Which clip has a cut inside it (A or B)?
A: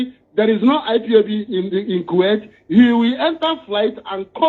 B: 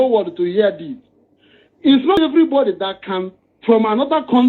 B